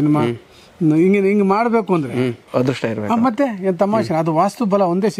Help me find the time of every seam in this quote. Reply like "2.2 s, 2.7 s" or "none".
2.4 s